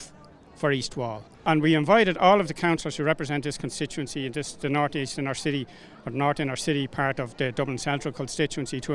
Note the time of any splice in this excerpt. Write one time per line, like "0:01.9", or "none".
0:01.3